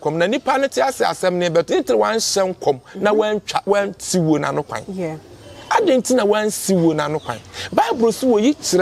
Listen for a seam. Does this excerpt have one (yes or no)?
no